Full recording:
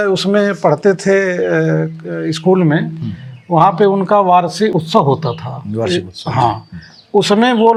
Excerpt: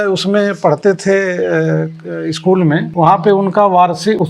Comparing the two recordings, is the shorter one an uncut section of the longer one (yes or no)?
no